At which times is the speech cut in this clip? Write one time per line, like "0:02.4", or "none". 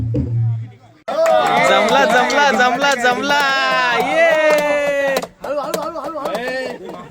0:00.9